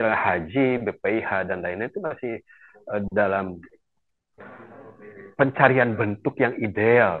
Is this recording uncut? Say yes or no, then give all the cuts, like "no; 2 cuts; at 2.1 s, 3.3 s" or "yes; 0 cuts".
yes; 0 cuts